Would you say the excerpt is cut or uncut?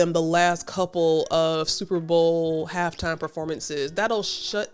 uncut